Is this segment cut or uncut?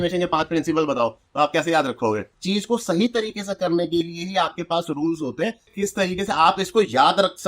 cut